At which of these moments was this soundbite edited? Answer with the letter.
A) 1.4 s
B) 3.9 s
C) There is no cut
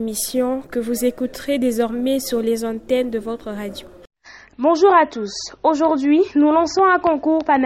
B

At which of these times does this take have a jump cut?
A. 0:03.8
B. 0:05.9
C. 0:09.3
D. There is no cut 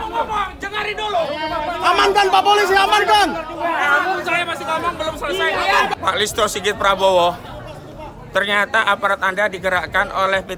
B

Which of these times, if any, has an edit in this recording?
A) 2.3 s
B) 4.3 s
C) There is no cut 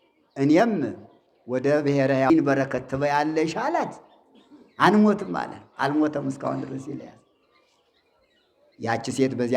A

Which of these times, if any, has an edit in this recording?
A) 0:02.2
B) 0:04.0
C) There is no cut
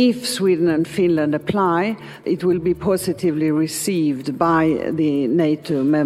A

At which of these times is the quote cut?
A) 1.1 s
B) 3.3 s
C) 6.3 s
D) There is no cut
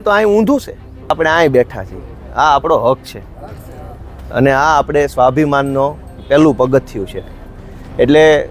A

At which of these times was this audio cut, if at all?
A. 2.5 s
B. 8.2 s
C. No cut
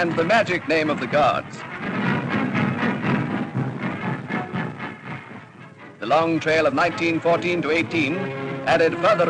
A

